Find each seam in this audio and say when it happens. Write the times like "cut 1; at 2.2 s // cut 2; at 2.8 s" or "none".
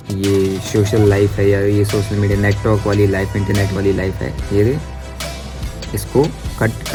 none

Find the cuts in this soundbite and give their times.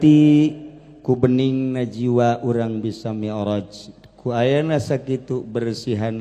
none

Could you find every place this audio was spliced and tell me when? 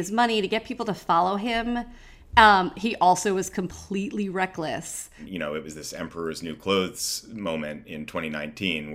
cut 1; at 5.2 s

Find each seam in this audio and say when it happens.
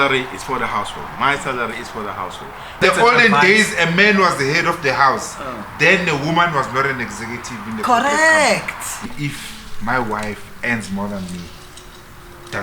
cut 1; at 2.8 s // cut 2; at 9.1 s

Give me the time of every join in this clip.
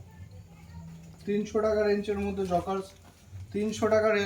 none

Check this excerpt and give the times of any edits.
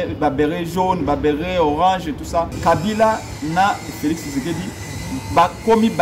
cut 1; at 2.5 s

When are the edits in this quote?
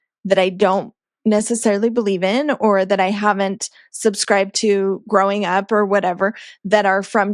none

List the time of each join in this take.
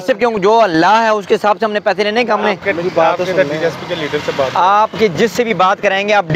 none

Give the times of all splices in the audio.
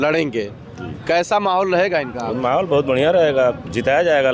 none

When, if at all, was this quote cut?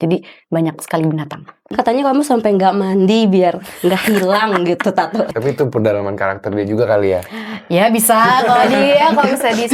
cut 1; at 1.6 s // cut 2; at 5.3 s

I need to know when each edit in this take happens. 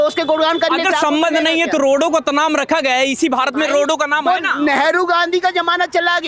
none

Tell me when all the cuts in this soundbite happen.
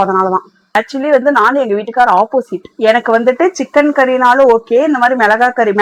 none

